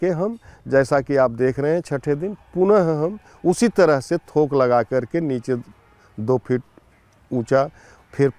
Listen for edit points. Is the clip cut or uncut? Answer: uncut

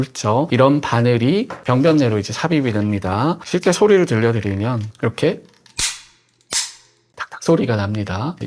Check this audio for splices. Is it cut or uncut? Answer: cut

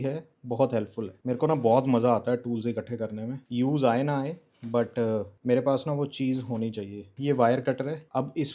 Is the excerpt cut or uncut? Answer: uncut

